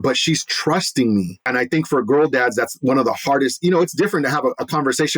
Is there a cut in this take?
yes; 1 cut; at 1.4 s

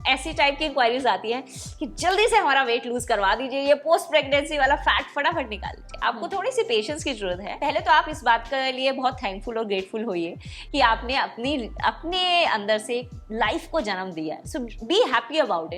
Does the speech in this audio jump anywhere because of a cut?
yes; 1 cut; at 7.5 s

